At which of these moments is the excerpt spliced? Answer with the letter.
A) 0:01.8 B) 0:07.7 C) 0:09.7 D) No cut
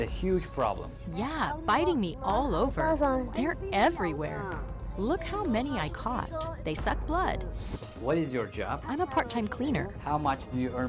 B